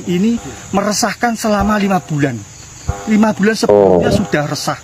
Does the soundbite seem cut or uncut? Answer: uncut